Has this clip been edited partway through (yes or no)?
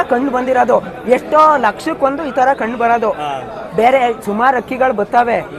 no